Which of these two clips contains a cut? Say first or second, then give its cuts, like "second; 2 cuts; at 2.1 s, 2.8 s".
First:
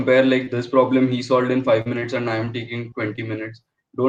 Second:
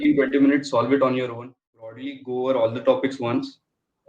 second; 1 cut; at 2.0 s